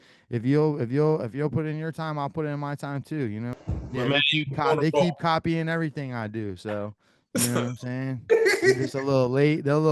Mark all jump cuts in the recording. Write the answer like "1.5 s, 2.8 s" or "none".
3.5 s